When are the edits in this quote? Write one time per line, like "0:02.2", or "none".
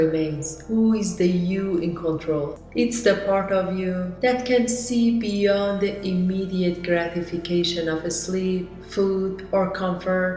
0:02.6